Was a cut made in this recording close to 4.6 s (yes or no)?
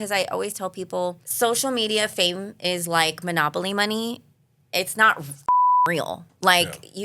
no